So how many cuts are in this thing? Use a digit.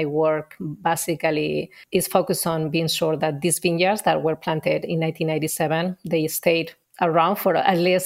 0